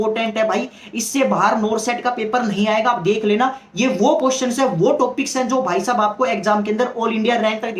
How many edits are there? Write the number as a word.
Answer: zero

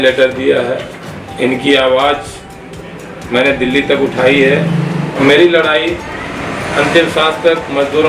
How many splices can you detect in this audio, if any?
one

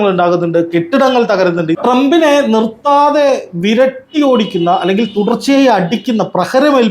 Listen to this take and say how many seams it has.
one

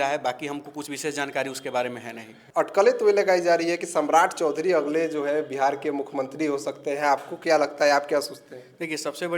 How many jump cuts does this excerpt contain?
one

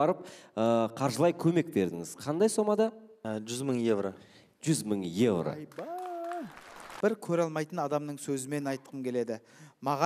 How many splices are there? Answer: two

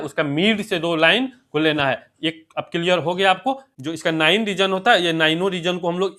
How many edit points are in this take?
one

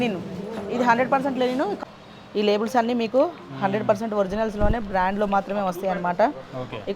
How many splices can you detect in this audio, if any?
one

